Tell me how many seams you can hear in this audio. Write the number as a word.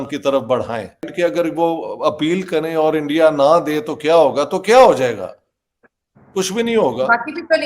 one